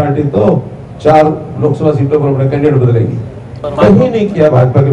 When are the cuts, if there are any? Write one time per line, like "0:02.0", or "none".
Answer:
0:03.6